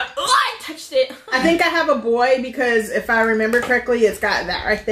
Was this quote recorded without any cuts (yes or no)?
no